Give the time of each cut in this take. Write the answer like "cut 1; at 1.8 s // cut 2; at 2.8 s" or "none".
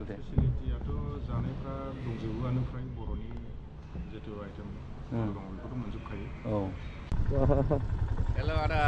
cut 1; at 7.0 s